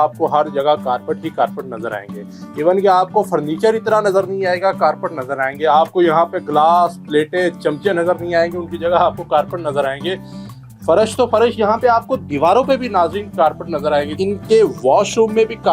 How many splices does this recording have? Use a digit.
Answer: 1